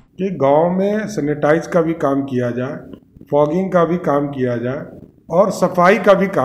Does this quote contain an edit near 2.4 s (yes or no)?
no